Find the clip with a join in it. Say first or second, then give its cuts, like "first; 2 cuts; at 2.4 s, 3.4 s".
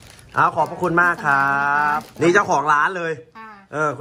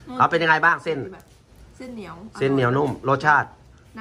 first; 1 cut; at 2.1 s